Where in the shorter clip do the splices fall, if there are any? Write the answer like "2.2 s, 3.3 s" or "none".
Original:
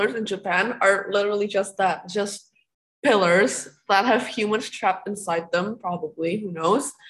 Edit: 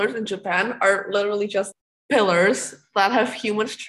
1.7 s